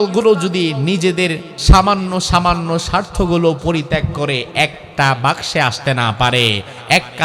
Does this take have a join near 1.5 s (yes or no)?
yes